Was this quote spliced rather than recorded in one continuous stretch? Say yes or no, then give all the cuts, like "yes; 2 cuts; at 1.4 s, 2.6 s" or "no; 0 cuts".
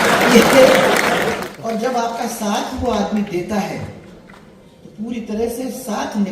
yes; 1 cut; at 1.4 s